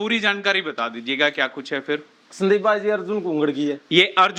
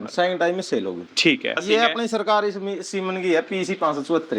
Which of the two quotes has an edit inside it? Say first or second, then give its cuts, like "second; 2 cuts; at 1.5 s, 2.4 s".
second; 1 cut; at 1.6 s